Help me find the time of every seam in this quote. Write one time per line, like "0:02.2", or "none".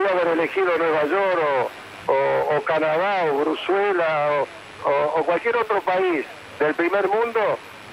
none